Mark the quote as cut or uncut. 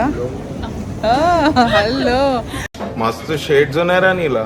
uncut